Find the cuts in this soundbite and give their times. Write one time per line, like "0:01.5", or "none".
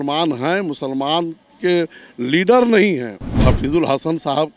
0:03.4

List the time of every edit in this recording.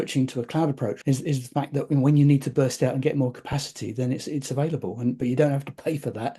0:01.0

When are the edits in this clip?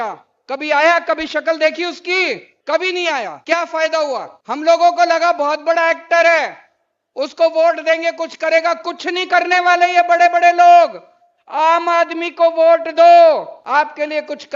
0:02.5
0:03.4
0:04.3
0:13.6

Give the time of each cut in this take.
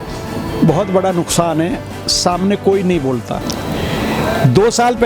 0:03.5

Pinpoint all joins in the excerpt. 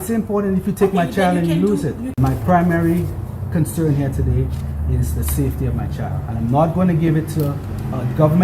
0:02.1

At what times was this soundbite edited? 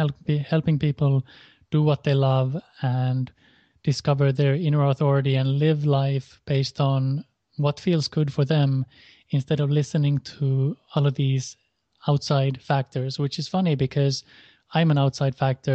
0:05.3

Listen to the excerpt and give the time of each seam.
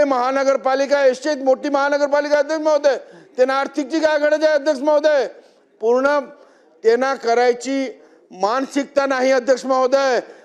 none

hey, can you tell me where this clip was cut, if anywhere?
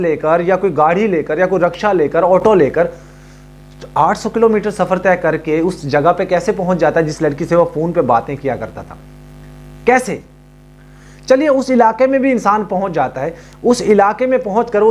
none

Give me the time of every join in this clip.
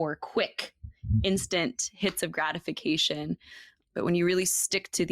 0:03.8

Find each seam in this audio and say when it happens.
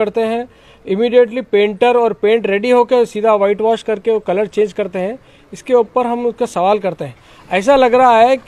none

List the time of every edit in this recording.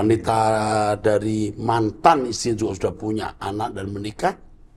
none

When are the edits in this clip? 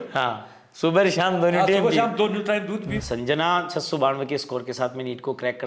0:02.9

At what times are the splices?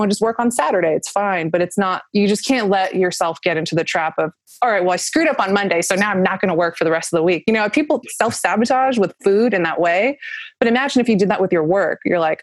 0:08.0

